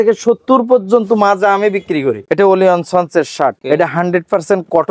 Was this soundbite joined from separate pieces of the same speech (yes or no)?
yes